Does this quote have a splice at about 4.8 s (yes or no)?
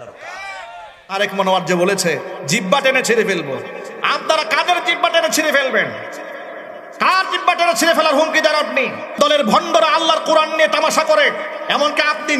no